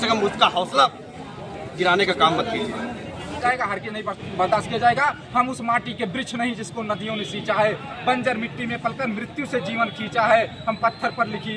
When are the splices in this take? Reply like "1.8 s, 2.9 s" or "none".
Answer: 3.4 s

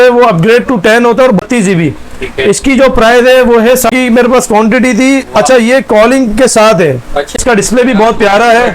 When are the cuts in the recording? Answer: 1.4 s, 3.9 s, 7.4 s

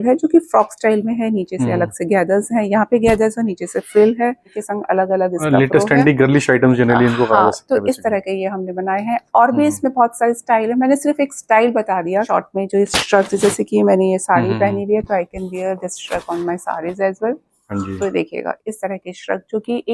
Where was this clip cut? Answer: 4.6 s, 12.3 s

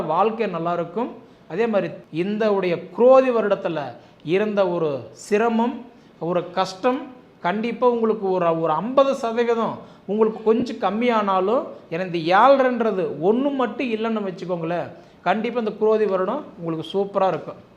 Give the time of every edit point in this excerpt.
2.0 s

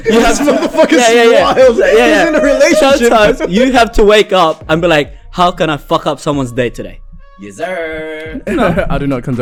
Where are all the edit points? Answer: none

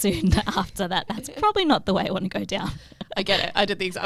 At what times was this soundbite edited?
none

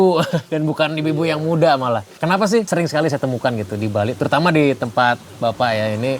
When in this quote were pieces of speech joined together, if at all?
2.6 s

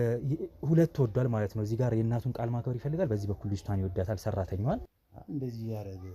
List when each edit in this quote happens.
5.0 s

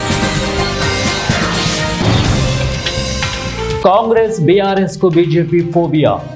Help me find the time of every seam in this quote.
3.8 s

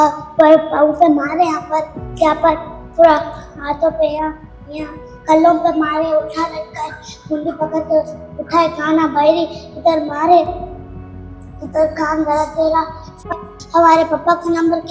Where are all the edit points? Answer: 13.3 s

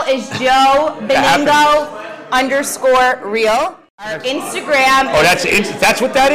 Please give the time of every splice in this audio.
3.8 s

